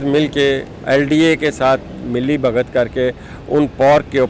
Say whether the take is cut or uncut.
uncut